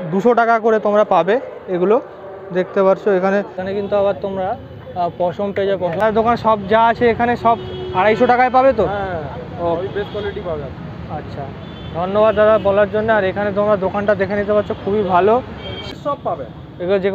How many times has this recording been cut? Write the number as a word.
three